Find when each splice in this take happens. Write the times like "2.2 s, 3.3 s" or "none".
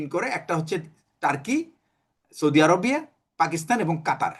none